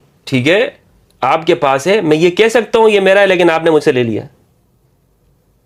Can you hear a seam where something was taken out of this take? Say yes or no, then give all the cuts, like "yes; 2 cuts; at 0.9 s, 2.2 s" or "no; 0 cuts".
no; 0 cuts